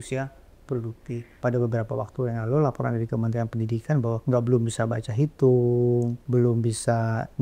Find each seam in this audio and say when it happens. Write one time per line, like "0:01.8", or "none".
0:01.3
0:04.2
0:06.2